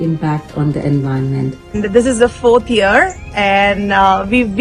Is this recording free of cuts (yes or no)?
no